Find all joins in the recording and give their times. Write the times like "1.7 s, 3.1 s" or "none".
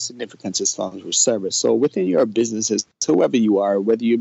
none